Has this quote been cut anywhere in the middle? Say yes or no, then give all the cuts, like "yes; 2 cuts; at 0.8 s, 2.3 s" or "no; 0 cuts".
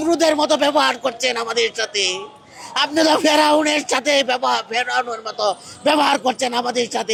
no; 0 cuts